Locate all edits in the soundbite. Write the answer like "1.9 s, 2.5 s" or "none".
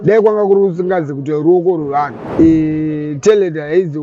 2.2 s